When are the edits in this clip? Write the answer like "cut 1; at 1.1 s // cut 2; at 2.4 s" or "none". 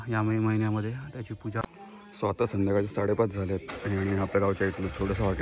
cut 1; at 1.6 s